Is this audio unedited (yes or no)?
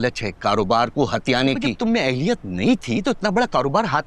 no